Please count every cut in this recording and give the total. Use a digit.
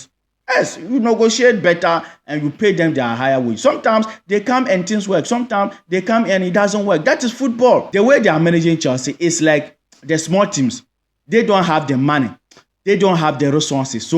1